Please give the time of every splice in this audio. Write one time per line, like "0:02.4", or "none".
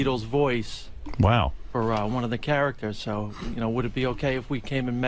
0:01.0